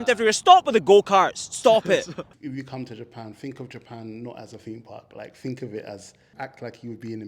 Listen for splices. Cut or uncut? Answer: cut